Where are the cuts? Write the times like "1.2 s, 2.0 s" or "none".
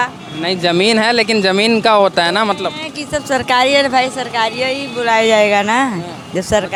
none